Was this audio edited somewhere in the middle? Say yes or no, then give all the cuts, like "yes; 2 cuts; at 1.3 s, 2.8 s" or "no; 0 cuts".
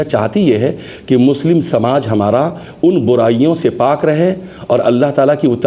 no; 0 cuts